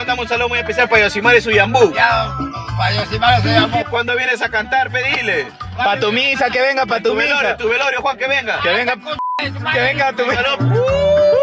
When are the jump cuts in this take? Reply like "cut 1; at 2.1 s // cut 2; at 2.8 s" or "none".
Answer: none

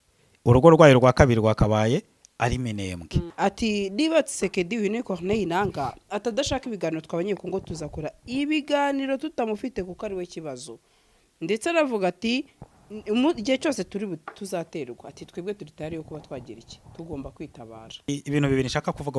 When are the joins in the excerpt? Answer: cut 1; at 3.3 s // cut 2; at 18.1 s

